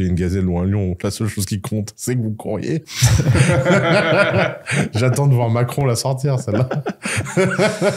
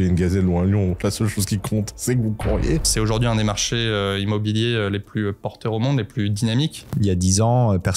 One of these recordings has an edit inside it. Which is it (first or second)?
second